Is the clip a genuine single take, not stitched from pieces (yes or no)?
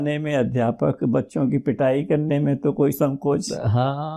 yes